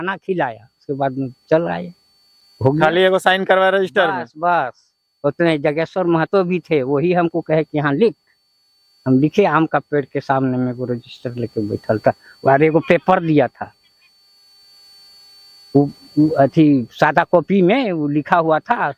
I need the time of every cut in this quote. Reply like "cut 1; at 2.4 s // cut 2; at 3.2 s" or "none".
none